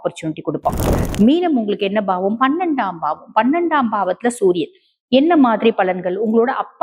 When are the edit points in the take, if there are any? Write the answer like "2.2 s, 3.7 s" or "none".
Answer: 0.9 s